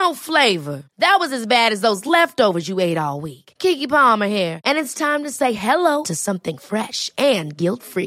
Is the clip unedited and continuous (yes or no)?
yes